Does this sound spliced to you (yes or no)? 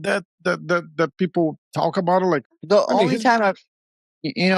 no